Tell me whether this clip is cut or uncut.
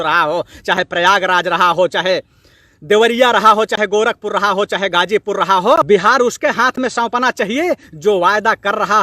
cut